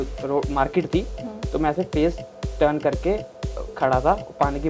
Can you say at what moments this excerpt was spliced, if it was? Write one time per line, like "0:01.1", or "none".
none

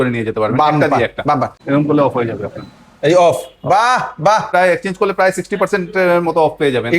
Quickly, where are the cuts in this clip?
0:01.5
0:04.5

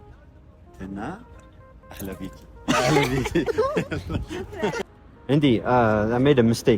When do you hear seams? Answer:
0:04.8

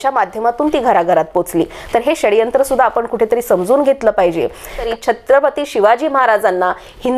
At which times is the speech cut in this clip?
0:04.8

